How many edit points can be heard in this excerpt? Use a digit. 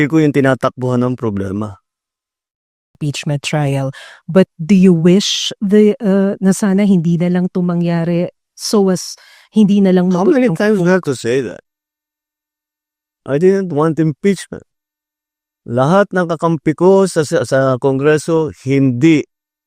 1